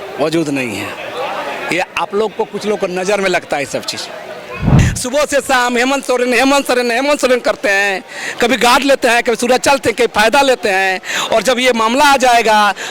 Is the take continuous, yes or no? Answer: no